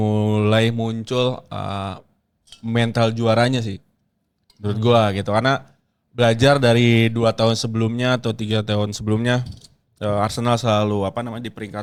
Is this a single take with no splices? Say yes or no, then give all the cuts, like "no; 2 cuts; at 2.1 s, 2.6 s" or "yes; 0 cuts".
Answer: yes; 0 cuts